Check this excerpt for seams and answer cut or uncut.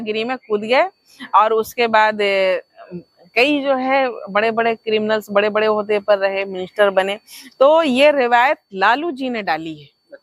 uncut